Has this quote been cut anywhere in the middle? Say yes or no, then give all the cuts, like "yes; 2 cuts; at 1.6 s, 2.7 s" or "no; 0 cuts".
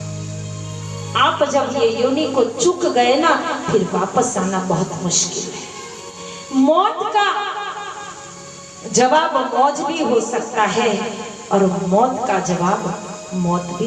yes; 1 cut; at 6.2 s